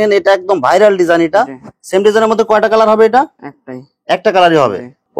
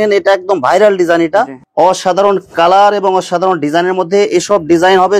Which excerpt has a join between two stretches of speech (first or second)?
second